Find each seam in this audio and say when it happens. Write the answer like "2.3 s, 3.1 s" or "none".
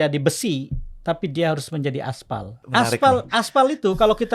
2.6 s

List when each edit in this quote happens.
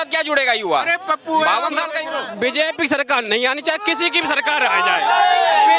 2.2 s

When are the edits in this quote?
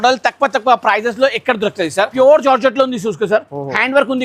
2.1 s

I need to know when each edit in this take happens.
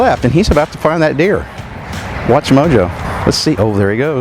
3.1 s

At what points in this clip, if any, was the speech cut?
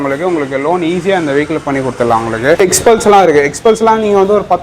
2.6 s

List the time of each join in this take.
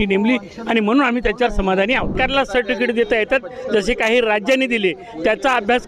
2.1 s

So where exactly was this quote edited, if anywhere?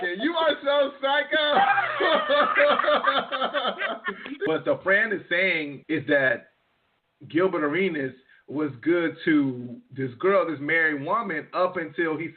4.5 s, 5.8 s

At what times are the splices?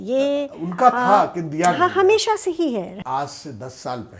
2.9 s

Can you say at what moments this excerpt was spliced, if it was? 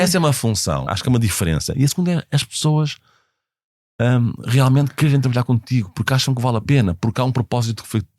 0.9 s

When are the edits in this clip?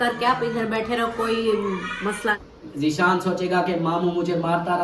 2.3 s

